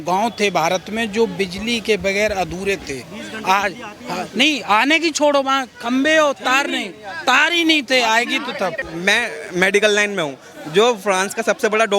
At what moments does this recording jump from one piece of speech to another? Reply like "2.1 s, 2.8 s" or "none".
8.9 s